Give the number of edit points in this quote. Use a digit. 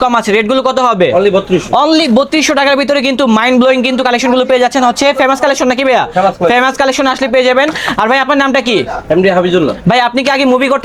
0